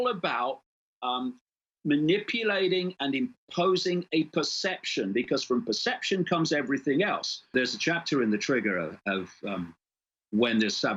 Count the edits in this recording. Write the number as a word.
one